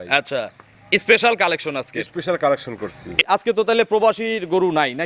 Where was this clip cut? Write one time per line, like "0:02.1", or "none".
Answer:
0:03.2